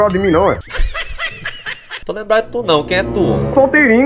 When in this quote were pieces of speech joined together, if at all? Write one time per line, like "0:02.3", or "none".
none

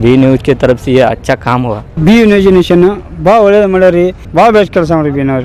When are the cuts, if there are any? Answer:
0:01.9
0:04.2

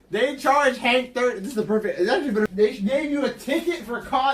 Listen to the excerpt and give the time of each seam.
0:02.5

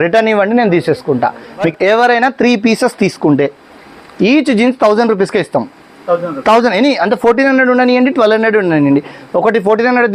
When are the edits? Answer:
0:01.7

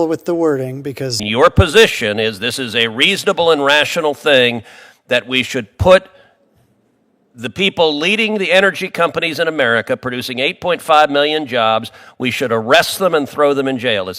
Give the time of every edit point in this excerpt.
0:01.2

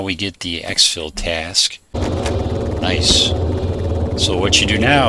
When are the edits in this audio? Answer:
0:01.9

